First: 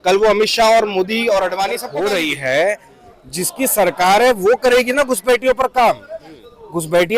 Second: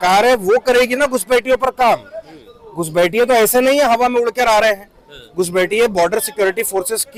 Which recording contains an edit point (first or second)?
first